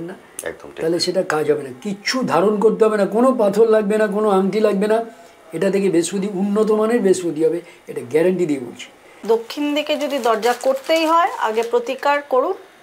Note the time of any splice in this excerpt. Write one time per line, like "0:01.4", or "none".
0:09.1

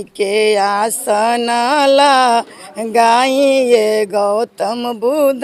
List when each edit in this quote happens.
none

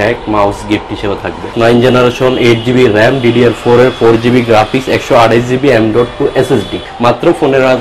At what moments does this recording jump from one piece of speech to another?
0:01.5
0:06.9

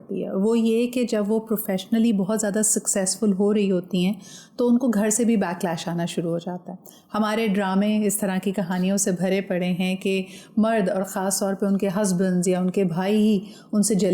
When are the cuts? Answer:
none

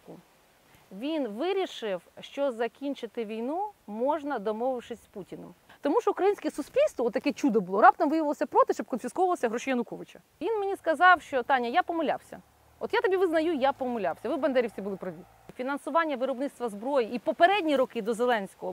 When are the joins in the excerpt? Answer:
0:05.7
0:10.3
0:15.4

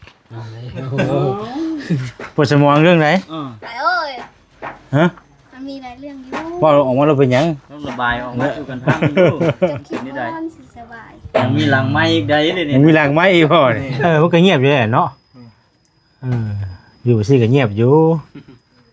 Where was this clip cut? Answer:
0:13.9

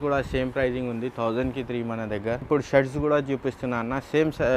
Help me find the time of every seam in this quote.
0:02.5

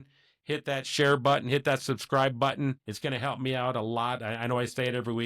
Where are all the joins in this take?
0:02.9

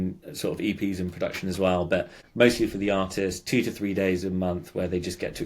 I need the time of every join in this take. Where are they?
0:02.2

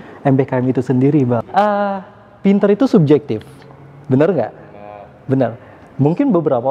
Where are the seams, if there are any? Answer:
0:01.4

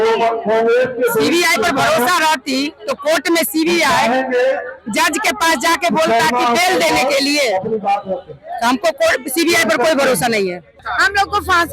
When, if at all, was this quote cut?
0:10.8

